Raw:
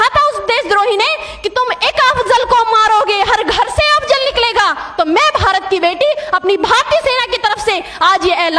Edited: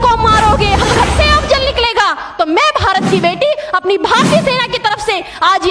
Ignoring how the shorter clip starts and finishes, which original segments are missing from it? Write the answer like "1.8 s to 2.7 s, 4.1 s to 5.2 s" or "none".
3.4 s to 3.5 s